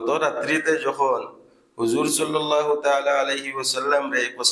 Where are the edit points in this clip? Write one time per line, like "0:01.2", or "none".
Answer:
none